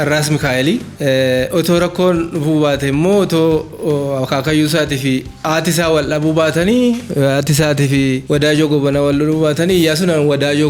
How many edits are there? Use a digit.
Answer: 0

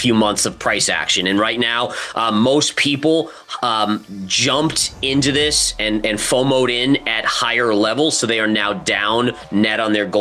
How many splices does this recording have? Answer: 0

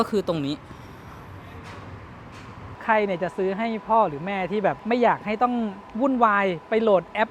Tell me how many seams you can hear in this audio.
2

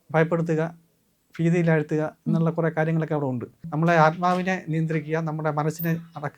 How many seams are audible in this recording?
1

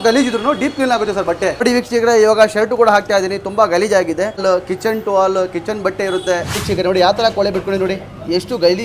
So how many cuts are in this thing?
3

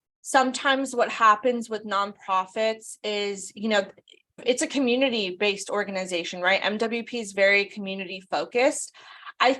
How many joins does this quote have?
1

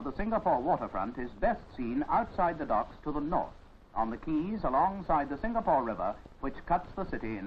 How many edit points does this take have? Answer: 1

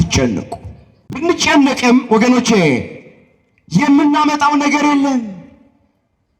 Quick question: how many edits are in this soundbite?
1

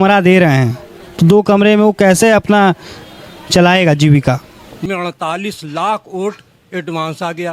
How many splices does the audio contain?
1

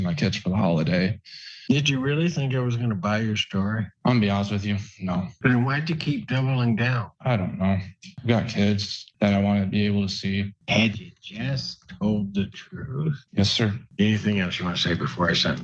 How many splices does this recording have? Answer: 5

